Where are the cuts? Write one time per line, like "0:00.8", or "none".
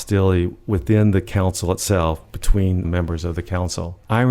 0:02.9